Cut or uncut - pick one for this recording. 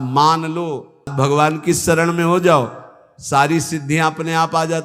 cut